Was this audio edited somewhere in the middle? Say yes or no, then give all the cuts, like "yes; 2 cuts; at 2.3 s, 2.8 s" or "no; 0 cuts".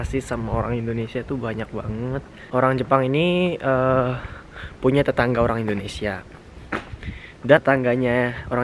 yes; 2 cuts; at 2.4 s, 7.6 s